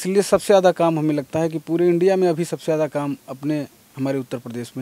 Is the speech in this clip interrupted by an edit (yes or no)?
no